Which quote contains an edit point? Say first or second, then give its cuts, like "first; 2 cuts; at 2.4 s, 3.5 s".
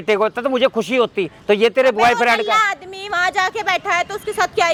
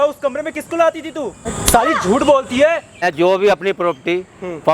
second; 2 cuts; at 1.5 s, 3.0 s